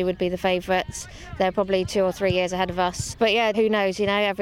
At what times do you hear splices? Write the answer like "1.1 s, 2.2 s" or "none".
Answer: 3.2 s